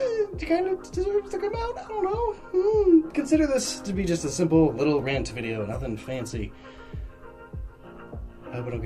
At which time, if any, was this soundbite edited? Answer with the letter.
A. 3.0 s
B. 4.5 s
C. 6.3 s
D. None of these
A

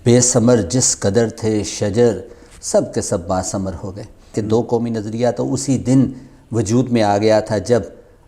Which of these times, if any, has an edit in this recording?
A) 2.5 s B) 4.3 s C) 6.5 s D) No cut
B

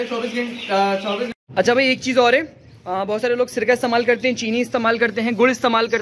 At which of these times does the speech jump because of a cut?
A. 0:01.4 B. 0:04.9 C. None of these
A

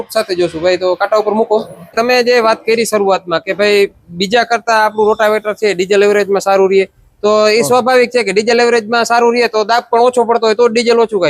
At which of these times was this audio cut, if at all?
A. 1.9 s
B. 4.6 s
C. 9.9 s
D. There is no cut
A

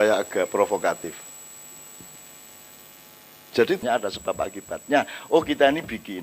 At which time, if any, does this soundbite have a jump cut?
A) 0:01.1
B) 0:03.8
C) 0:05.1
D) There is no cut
B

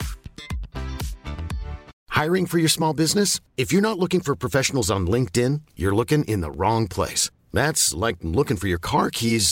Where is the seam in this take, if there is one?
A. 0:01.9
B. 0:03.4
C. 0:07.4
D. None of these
A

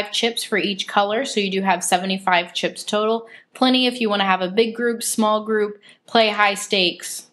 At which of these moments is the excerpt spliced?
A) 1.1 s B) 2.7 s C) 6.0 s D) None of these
B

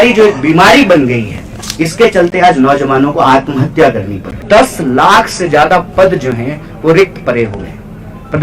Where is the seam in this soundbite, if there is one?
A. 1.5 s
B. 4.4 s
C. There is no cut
B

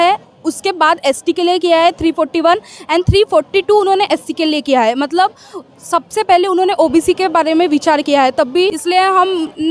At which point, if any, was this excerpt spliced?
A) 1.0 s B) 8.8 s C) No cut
B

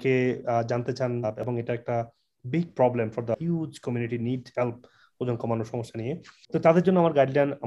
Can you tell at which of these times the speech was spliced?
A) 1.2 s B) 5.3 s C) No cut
A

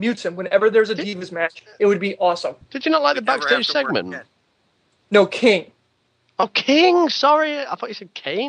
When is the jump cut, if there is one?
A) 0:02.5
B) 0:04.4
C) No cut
A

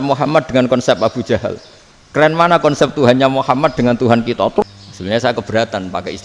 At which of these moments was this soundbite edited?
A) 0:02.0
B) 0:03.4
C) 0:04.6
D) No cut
C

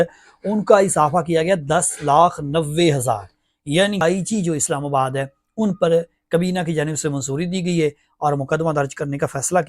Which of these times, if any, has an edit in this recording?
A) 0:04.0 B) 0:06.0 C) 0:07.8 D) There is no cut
A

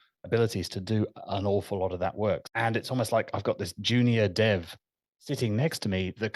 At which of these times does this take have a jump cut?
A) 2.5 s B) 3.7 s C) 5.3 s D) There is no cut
A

